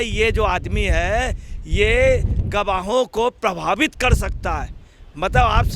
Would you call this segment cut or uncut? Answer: uncut